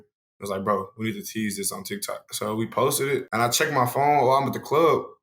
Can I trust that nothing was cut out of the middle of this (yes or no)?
no